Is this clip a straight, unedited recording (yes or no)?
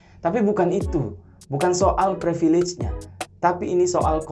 yes